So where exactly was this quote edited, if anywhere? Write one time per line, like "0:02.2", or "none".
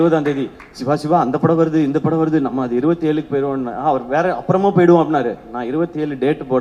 none